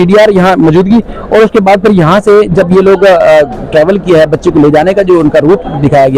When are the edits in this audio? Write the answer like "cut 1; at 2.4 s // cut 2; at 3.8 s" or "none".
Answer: none